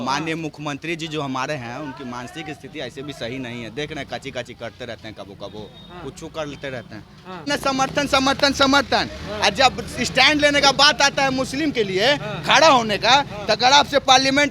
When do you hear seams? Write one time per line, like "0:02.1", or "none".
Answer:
0:07.5